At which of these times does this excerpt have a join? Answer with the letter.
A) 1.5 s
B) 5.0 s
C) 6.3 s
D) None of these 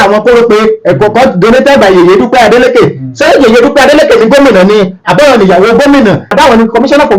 C